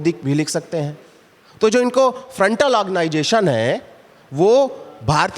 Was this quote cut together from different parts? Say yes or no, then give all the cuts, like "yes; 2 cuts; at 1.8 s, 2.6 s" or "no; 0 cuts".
no; 0 cuts